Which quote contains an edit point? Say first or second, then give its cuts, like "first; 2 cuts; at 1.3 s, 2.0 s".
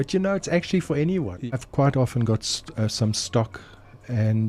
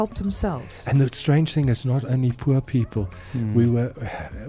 first; 1 cut; at 1.5 s